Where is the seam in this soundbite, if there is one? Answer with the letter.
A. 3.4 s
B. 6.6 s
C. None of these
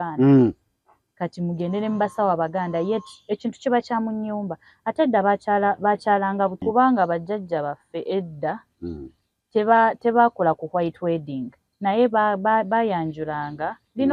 B